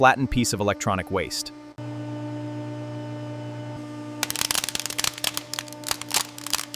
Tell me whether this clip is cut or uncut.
cut